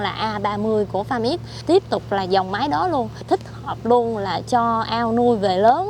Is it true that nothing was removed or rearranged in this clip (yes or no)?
no